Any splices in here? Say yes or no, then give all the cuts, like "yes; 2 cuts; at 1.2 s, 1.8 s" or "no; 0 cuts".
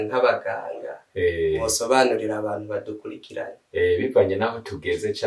no; 0 cuts